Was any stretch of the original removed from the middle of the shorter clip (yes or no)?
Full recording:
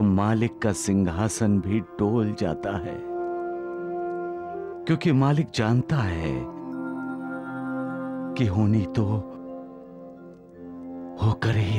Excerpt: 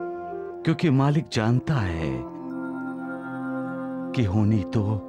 no